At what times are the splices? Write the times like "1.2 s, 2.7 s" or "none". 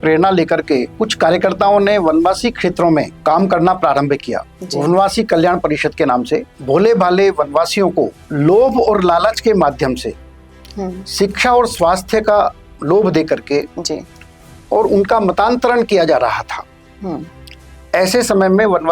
0.9 s, 3.1 s, 6.5 s, 8.2 s

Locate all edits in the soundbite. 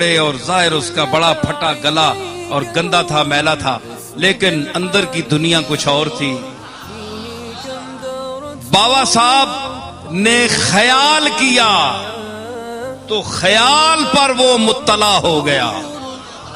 12.0 s, 13.1 s

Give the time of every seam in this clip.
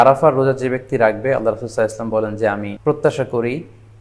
2.7 s

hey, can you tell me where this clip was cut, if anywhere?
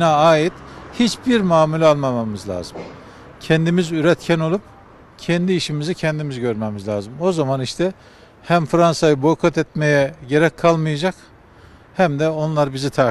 none

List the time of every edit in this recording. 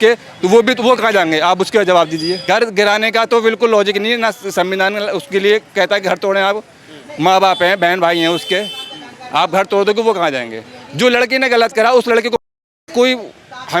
2.4 s

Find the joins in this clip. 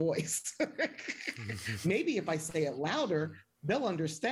none

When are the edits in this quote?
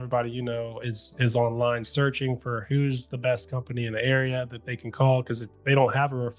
none

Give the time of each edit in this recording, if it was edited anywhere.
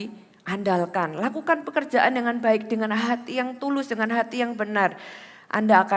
none

